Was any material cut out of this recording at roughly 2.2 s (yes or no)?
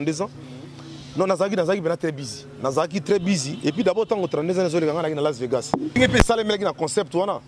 no